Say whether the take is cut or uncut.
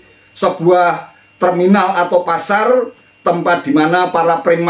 uncut